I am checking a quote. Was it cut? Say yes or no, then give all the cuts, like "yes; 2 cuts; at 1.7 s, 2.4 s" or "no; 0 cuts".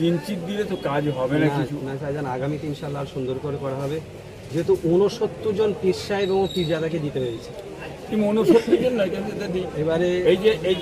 no; 0 cuts